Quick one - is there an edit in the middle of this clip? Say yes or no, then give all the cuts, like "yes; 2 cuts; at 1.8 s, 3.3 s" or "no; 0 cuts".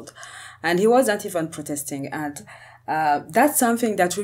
no; 0 cuts